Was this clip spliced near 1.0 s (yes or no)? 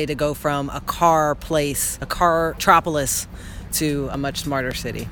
no